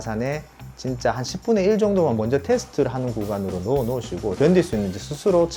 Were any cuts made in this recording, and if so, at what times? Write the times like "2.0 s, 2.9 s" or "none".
4.3 s